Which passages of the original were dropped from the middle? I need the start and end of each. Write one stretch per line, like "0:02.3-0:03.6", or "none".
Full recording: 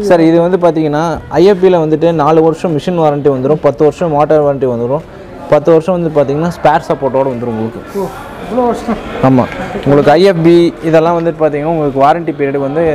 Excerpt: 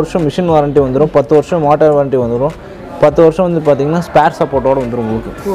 none